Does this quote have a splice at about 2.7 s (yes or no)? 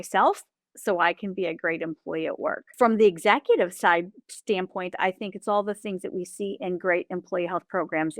yes